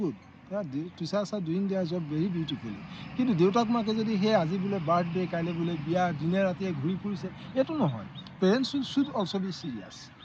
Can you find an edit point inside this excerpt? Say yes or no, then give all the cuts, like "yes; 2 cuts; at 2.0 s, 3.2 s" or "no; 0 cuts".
no; 0 cuts